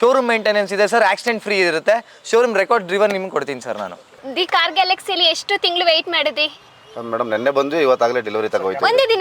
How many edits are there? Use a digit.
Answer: 1